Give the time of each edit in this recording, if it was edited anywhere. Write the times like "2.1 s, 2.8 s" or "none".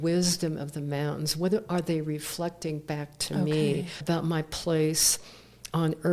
3.9 s

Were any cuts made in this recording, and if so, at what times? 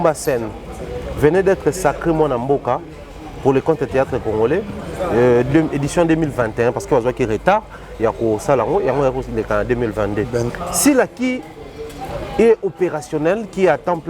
10.5 s

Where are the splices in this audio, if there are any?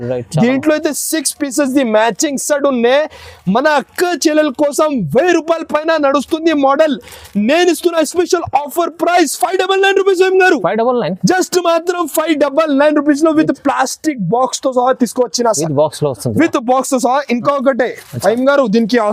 none

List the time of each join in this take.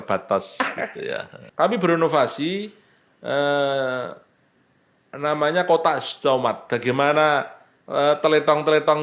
1.4 s

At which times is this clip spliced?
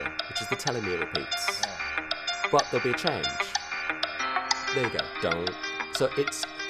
4.0 s

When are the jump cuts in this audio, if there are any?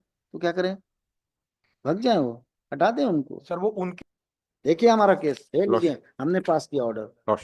3.9 s

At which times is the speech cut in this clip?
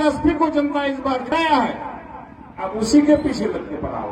1.3 s

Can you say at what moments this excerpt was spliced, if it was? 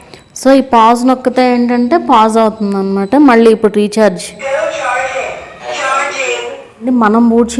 5.6 s, 6.8 s

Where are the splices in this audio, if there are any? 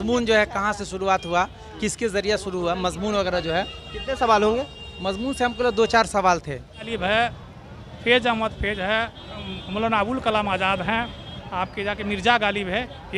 6.9 s

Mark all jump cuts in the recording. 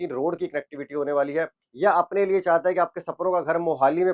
1.6 s

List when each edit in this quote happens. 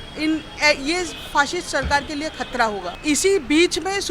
2.9 s

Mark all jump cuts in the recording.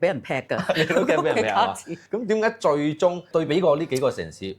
1.9 s, 3.3 s

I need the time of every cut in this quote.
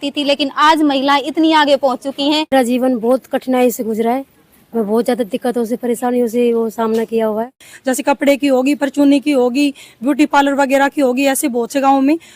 2.5 s, 7.7 s

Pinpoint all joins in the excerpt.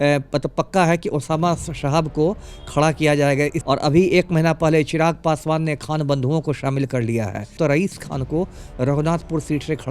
3.6 s, 7.6 s

